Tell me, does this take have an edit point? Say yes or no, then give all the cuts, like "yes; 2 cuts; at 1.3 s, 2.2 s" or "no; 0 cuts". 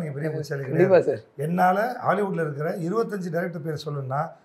no; 0 cuts